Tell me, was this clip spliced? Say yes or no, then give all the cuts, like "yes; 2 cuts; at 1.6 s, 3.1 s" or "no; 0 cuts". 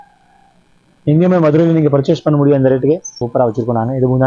yes; 1 cut; at 3.2 s